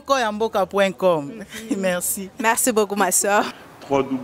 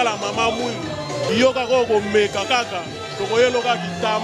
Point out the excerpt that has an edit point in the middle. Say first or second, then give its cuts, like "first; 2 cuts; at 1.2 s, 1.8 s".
second; 1 cut; at 0.9 s